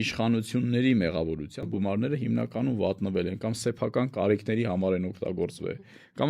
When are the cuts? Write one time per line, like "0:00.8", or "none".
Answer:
0:01.7